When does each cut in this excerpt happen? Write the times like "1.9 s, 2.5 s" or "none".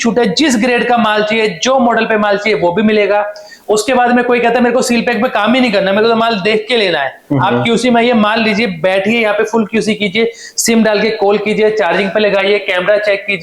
none